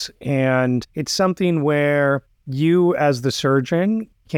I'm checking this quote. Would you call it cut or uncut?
cut